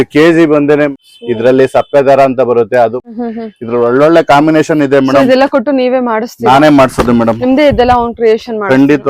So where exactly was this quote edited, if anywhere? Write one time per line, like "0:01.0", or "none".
0:00.9
0:03.0

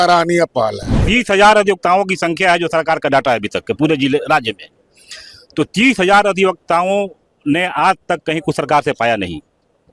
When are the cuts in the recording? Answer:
0:00.9

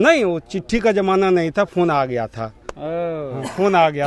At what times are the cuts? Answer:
none

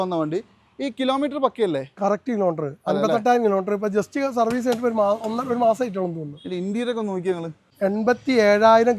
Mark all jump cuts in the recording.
0:07.7

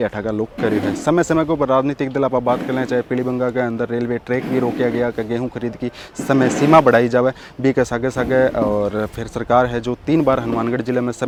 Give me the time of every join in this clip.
none

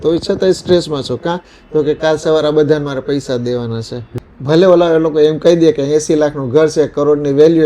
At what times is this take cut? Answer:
0:04.1

